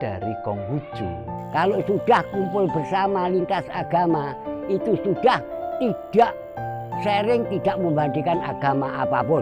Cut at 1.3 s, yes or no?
yes